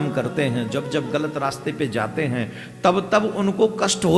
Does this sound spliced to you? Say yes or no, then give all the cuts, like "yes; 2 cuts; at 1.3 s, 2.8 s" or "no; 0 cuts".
no; 0 cuts